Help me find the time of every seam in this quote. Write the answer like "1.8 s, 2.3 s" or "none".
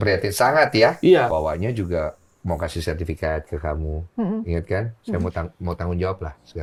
none